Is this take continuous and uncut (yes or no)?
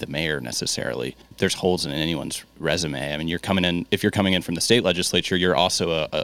no